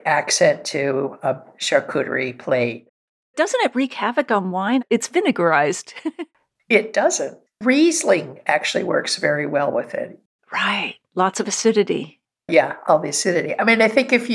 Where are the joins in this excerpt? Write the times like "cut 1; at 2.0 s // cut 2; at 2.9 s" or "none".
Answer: cut 1; at 3.3 s // cut 2; at 4.8 s // cut 3; at 6.0 s // cut 4; at 7.4 s

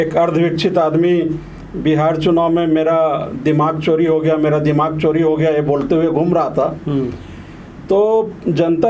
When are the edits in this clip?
none

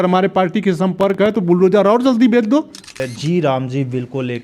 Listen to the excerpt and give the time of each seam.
cut 1; at 3.1 s

